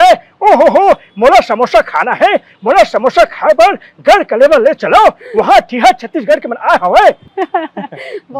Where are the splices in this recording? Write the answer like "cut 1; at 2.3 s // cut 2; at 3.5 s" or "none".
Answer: cut 1; at 7.2 s